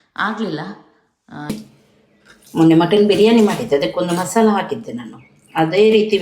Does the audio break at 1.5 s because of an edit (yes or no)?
yes